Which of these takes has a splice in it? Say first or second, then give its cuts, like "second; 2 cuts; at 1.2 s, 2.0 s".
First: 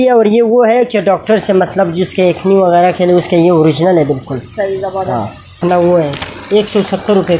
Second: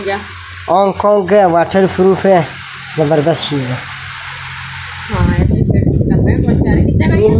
first; 1 cut; at 5.6 s